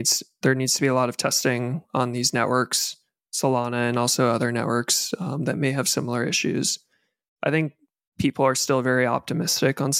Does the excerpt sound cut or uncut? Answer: uncut